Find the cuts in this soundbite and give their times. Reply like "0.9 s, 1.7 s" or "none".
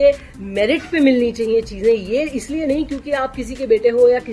none